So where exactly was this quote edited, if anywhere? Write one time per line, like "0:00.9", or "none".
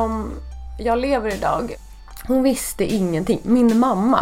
0:01.7